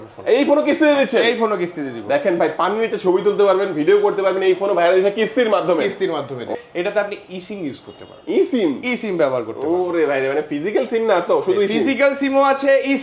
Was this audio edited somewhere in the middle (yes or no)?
yes